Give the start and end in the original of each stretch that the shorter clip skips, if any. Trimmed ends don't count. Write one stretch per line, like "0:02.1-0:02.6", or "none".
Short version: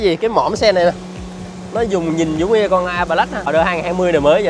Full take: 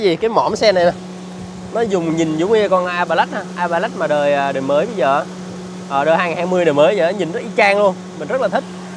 0:03.5-0:06.0